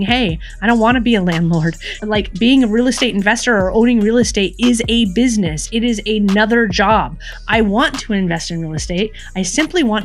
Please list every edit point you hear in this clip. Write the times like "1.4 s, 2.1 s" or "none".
2.0 s